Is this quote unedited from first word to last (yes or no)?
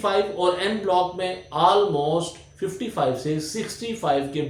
yes